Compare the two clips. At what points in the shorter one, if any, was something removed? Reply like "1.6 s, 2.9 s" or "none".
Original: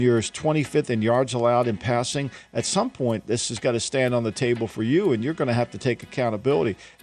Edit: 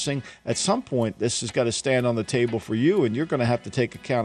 none